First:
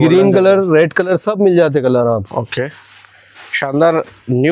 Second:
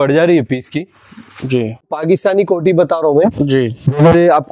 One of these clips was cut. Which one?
second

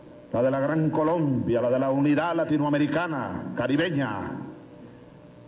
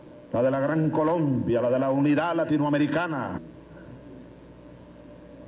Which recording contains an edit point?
first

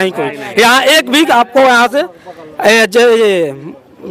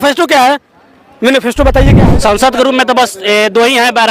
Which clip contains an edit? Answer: second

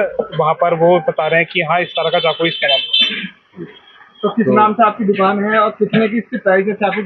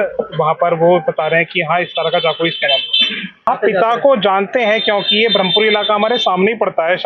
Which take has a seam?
second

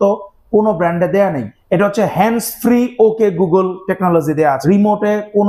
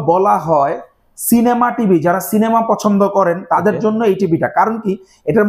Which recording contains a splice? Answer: first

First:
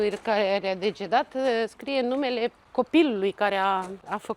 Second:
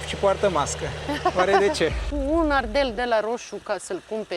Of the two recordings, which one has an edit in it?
second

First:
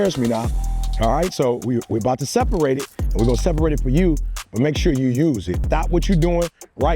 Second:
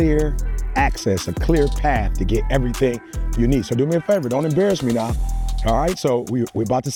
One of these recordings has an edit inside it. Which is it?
first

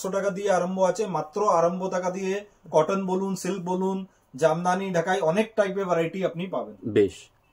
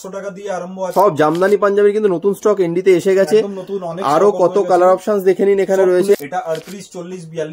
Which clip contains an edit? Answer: second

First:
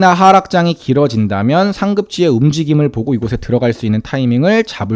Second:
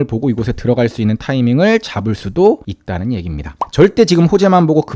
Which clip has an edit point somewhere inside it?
second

